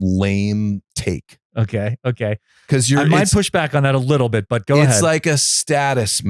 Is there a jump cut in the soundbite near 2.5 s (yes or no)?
no